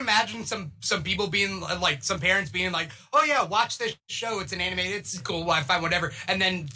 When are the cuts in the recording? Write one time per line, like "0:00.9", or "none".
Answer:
0:04.1